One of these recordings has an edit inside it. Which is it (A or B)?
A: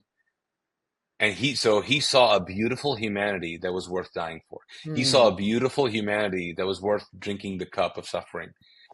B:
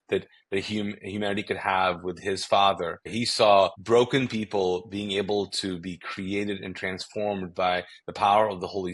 B